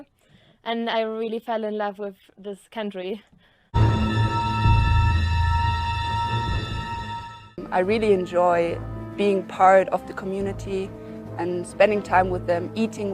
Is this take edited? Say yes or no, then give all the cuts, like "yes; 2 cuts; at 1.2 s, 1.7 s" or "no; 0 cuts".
yes; 1 cut; at 3.8 s